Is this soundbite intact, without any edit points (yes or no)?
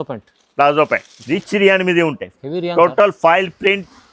no